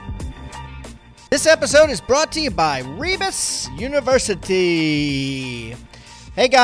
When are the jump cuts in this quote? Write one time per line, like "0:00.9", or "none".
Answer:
none

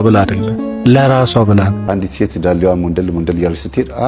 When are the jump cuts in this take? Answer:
0:01.8

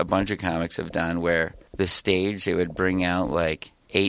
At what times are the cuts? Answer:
0:01.6

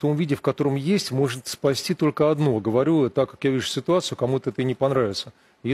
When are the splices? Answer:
none

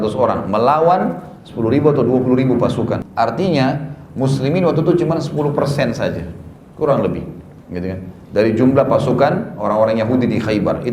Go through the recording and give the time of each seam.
0:03.0

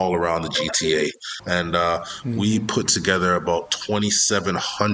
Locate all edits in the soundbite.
0:01.3

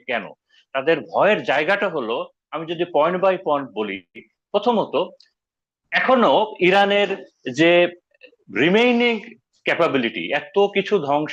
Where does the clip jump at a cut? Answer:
none

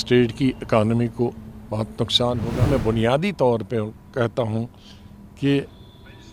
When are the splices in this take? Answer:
0:02.7

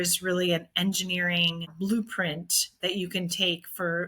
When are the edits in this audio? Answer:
0:01.7

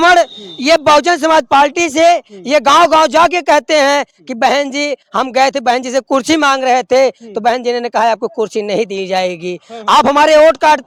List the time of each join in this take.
none

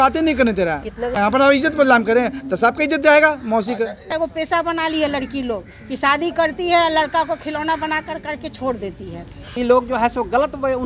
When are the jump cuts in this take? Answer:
0:01.2
0:04.1
0:09.6

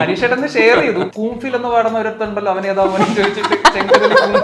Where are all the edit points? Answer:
0:01.1

